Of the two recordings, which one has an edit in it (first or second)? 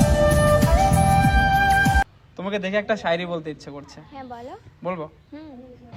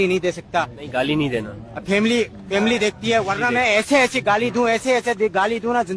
first